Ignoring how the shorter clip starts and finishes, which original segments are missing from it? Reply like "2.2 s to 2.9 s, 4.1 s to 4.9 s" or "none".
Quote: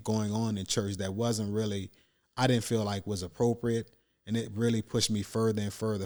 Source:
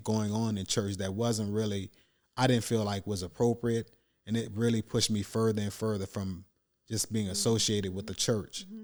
none